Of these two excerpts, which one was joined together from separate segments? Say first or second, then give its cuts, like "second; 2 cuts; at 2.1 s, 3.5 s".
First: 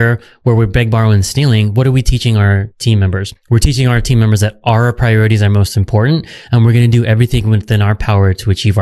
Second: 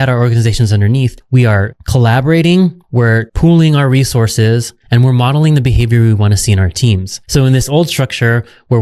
second; 2 cuts; at 1.2 s, 7.2 s